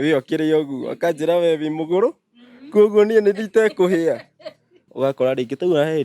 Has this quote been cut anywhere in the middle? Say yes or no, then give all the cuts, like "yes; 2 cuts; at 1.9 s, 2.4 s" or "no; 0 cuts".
yes; 1 cut; at 4.8 s